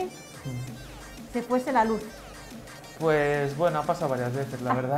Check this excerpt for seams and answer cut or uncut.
uncut